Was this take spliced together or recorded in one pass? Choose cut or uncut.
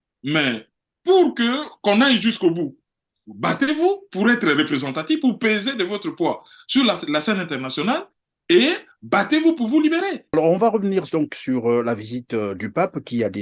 cut